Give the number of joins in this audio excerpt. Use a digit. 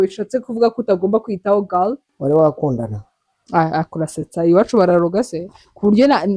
1